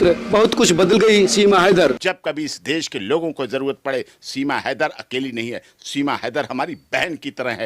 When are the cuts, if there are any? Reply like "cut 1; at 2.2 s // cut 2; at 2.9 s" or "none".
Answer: cut 1; at 2.0 s